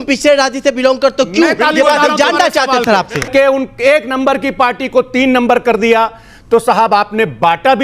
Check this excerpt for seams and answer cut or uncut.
cut